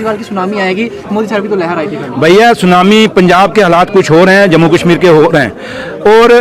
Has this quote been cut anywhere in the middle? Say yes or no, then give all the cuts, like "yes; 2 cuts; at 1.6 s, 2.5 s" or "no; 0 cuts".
no; 0 cuts